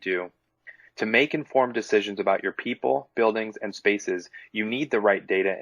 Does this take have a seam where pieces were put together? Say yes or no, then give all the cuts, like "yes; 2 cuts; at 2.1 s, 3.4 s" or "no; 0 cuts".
no; 0 cuts